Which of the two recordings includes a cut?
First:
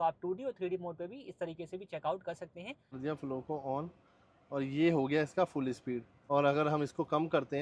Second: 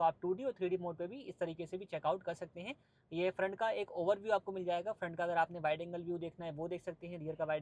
first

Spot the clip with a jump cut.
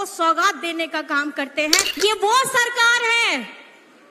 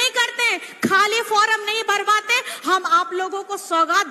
first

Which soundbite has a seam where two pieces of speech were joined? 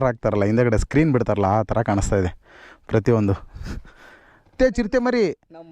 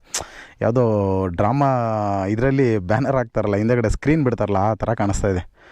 first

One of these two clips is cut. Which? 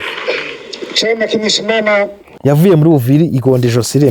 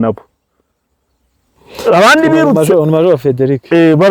first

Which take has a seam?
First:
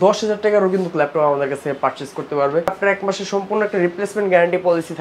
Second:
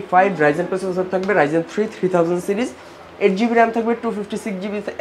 first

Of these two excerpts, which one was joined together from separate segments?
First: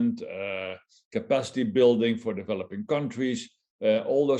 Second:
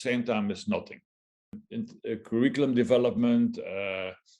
second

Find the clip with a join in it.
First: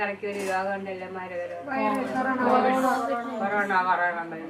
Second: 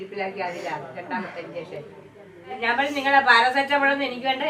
second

